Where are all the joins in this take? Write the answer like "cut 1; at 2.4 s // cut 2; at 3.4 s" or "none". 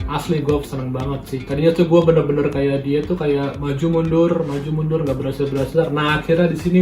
cut 1; at 1.4 s

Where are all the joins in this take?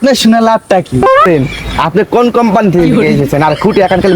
cut 1; at 1.2 s

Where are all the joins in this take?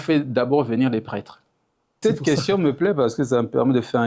cut 1; at 2.0 s

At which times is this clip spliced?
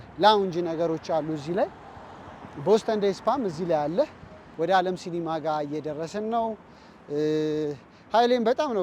cut 1; at 4.4 s

